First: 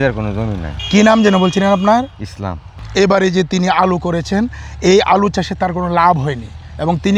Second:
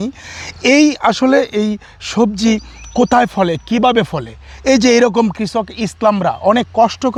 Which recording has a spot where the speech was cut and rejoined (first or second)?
first